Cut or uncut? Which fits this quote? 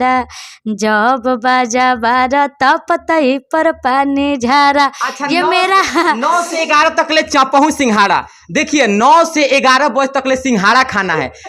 uncut